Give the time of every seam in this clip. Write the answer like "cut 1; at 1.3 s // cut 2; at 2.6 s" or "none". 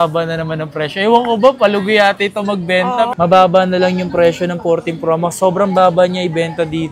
cut 1; at 3.1 s